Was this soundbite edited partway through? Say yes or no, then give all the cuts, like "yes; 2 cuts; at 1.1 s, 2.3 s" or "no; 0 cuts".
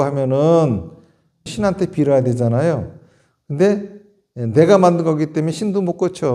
yes; 1 cut; at 1.4 s